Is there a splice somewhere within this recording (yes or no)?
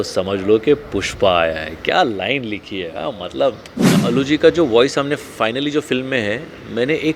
yes